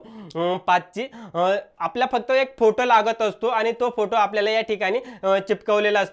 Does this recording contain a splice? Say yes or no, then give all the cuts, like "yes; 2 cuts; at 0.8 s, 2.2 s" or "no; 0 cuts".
no; 0 cuts